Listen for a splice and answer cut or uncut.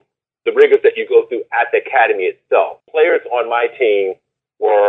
cut